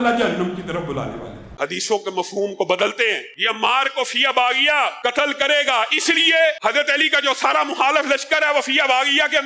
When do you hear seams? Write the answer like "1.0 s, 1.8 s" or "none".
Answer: 1.6 s